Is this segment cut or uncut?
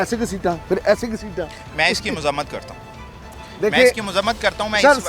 uncut